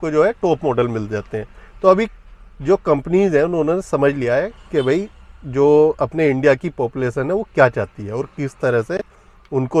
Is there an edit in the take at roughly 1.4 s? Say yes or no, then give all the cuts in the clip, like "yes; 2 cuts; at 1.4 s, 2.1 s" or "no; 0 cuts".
no; 0 cuts